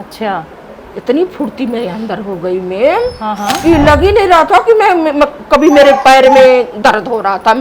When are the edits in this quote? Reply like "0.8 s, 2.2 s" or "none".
none